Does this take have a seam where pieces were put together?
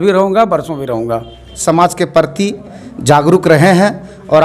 yes; 1 cut; at 1.5 s

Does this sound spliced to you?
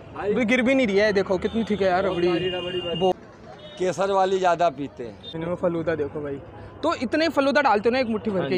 yes; 2 cuts; at 3.1 s, 5.3 s

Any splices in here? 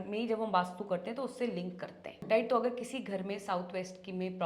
yes; 1 cut; at 2.2 s

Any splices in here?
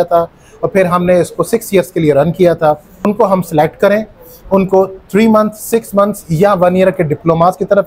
yes; 1 cut; at 3.1 s

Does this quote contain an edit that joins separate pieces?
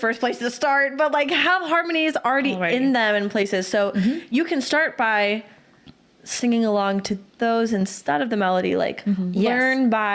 no; 0 cuts

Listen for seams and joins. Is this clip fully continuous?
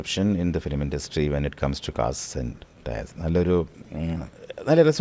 yes; 0 cuts

